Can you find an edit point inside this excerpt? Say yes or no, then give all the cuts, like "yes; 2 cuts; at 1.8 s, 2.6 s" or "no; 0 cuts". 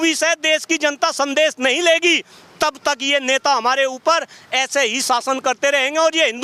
no; 0 cuts